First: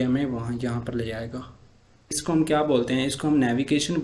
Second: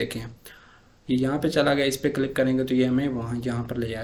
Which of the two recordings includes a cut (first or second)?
first